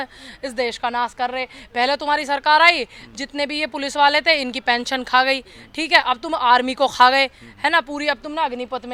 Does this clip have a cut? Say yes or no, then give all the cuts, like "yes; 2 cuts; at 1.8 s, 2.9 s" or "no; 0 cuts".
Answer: no; 0 cuts